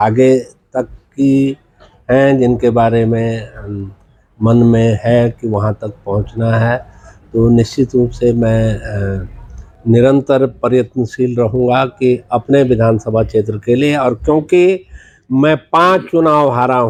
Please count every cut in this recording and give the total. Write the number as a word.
zero